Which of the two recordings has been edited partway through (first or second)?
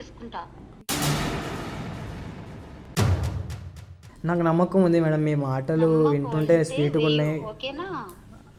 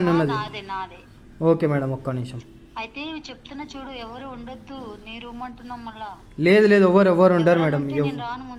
first